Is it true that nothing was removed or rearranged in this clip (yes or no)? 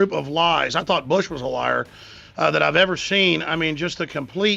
yes